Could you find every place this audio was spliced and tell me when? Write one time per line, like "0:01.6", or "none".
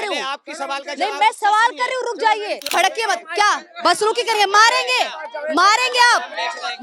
0:02.7